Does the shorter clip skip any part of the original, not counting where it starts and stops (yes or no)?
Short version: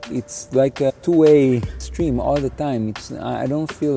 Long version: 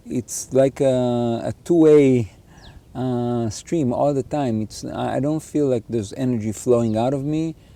yes